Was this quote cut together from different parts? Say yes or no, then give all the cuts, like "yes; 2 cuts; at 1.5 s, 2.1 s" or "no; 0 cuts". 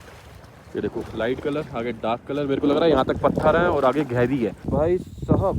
yes; 1 cut; at 4.6 s